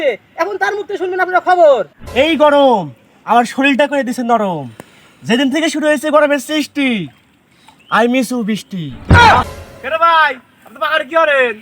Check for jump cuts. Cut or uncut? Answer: cut